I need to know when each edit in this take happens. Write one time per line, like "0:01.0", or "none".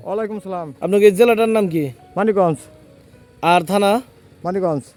none